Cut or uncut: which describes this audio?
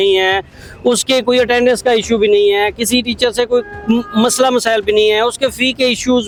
uncut